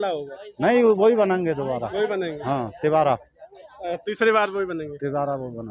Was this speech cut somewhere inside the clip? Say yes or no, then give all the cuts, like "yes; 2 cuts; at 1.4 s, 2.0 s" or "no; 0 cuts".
no; 0 cuts